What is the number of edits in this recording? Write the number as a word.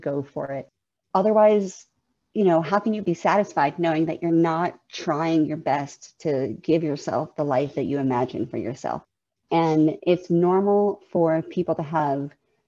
two